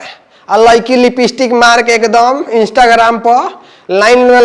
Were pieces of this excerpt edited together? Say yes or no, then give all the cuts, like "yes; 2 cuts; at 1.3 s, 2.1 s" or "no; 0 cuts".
no; 0 cuts